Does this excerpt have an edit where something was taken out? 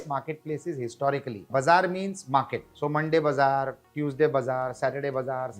yes; 2 cuts; at 1.5 s, 2.6 s

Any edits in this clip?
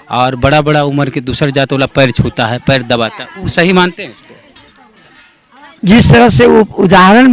no; 0 cuts

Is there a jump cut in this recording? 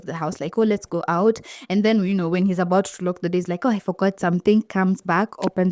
no; 0 cuts

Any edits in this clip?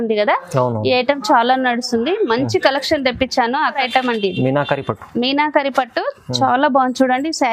yes; 1 cut; at 3.8 s

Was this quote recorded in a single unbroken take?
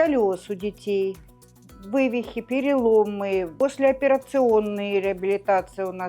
no; 1 cut; at 3.5 s

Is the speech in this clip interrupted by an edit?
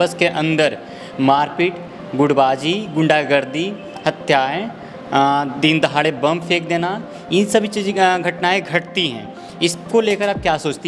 no; 0 cuts

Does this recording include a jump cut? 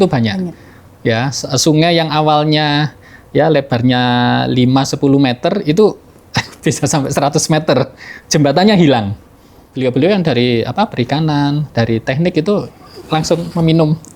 yes; 1 cut; at 9.7 s

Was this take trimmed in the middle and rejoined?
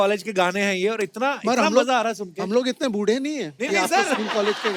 no; 0 cuts

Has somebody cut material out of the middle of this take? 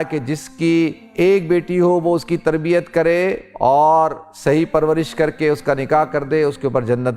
yes; 2 cuts; at 1.0 s, 3.5 s

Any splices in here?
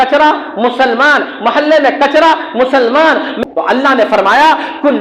yes; 1 cut; at 3.3 s

